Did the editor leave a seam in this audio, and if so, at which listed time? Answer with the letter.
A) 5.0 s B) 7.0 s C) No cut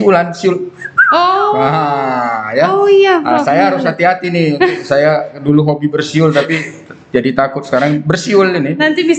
C